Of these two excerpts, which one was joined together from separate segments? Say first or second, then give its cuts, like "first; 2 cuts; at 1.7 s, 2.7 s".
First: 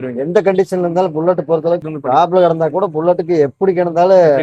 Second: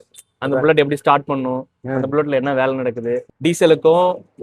first; 1 cut; at 1.8 s